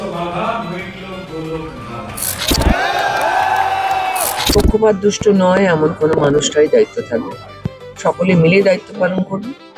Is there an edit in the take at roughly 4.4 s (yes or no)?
yes